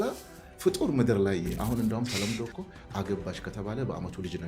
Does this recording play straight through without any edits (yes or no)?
no